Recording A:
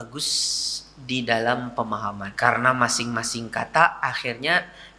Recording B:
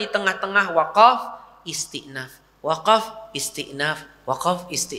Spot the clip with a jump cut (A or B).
A